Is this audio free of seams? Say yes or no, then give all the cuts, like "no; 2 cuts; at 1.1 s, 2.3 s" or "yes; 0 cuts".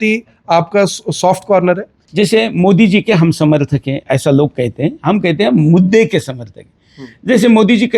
no; 1 cut; at 2.0 s